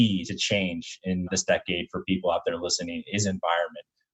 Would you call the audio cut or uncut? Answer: cut